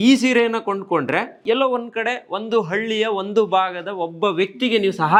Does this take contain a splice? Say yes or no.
no